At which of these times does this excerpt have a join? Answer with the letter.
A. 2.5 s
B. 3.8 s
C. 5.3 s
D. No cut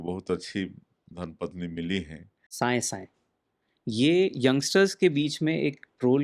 A